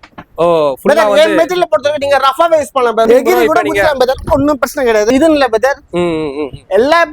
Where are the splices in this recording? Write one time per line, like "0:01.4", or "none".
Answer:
0:03.1
0:05.1